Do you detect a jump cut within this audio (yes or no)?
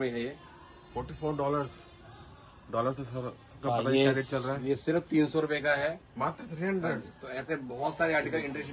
no